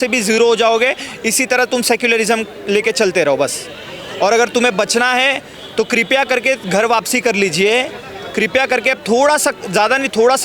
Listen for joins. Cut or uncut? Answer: uncut